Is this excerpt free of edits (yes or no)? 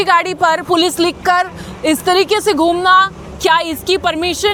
yes